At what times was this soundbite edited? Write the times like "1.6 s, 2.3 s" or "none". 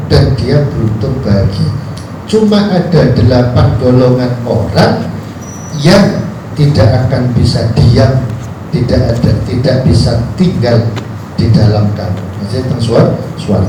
none